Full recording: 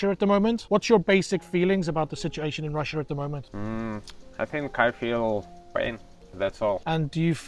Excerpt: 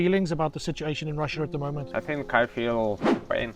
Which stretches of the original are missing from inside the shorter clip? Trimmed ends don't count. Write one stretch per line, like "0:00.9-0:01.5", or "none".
0:03.4-0:04.3